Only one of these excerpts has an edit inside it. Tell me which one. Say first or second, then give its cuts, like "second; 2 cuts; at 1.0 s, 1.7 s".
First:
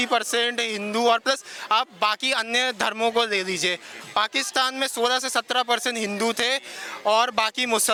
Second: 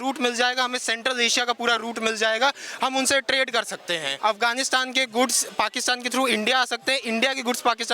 second; 1 cut; at 4.1 s